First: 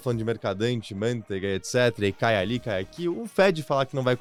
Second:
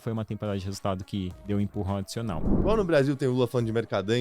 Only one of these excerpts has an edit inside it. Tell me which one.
second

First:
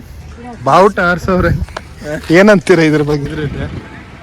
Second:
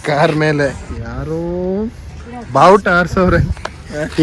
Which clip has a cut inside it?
first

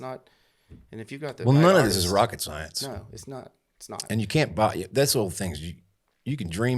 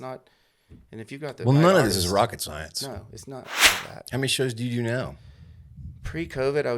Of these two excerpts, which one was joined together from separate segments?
second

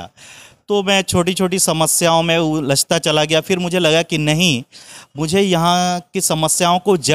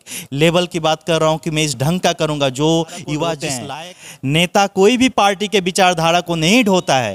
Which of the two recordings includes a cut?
second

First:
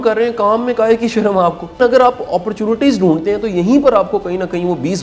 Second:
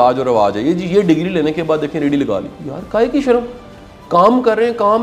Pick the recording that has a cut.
first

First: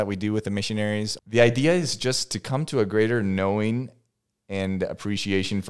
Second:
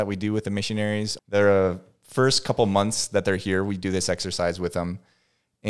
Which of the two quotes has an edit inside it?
first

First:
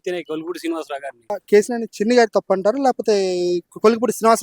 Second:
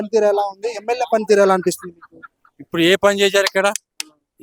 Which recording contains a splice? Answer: first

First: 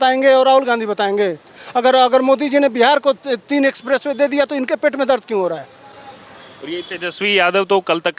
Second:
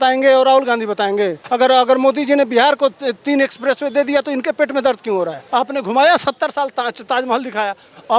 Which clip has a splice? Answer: second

